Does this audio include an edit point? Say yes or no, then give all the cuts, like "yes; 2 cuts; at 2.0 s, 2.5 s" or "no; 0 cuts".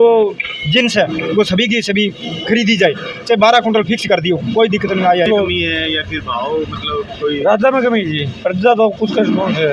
yes; 1 cut; at 5.3 s